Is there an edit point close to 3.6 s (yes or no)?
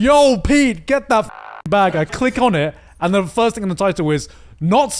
no